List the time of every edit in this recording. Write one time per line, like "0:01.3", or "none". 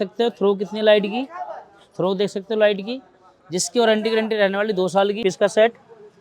0:05.2